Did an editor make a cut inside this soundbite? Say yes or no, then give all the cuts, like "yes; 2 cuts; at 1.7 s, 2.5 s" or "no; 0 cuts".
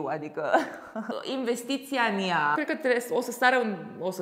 yes; 2 cuts; at 1.1 s, 2.6 s